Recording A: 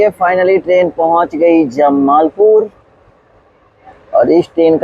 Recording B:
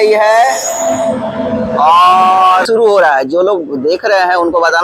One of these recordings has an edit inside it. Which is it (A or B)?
B